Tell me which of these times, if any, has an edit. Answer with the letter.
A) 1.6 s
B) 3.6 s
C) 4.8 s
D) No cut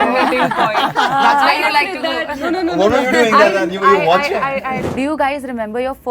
C